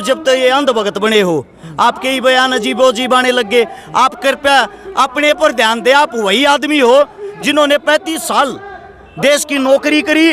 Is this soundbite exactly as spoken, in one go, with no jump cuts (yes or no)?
yes